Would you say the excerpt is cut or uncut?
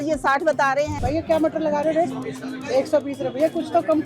cut